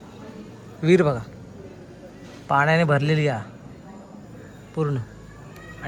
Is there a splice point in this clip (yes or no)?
no